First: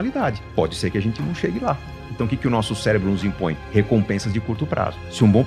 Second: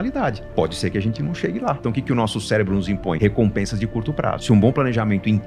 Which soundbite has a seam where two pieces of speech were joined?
second; 3 cuts; at 1.8 s, 3.2 s, 4.4 s

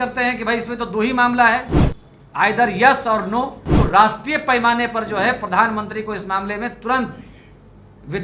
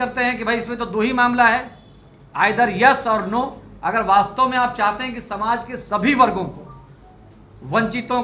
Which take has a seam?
first; 1 cut; at 3.6 s

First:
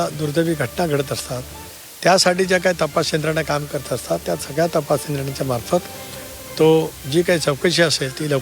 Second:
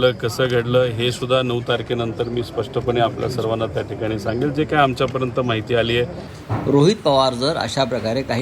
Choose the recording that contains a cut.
second; 1 cut; at 6.3 s

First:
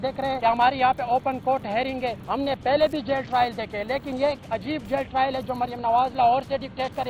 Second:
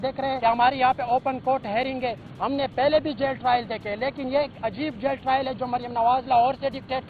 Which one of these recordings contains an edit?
first; 1 cut; at 2.2 s

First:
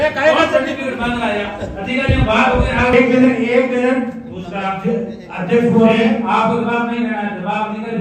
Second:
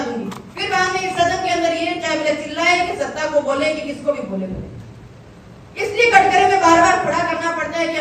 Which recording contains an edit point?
first; 1 cut; at 2.9 s

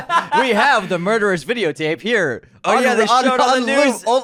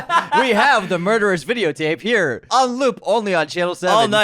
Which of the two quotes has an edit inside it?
second; 1 cut; at 2.5 s

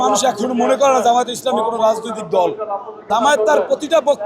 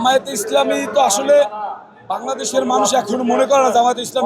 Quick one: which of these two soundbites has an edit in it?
first; 1 cut; at 3.0 s

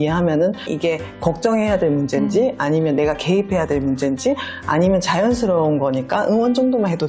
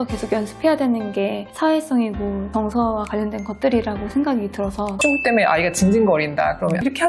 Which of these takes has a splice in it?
second; 2 cuts; at 1.5 s, 5.0 s

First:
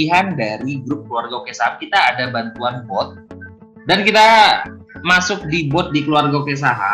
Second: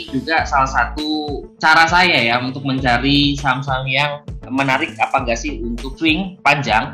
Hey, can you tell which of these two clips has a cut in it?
second; 2 cuts; at 1.5 s, 5.9 s

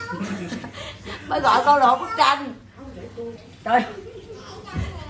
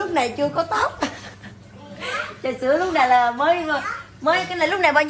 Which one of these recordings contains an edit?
first; 1 cut; at 3.3 s

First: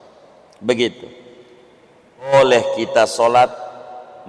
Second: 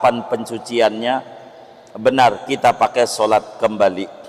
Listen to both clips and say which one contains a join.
first; 1 cut; at 2.3 s

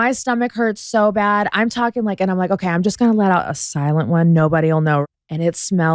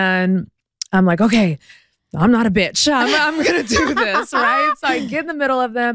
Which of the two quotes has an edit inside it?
first; 1 cut; at 5.0 s

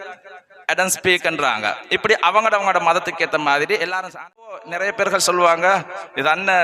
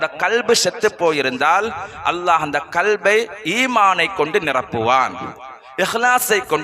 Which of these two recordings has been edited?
first; 1 cut; at 4.6 s

